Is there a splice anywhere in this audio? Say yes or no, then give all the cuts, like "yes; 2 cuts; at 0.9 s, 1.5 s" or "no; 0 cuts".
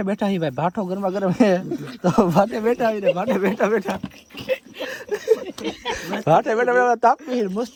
no; 0 cuts